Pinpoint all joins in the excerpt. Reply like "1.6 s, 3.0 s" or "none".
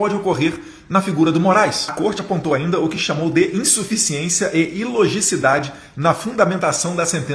1.8 s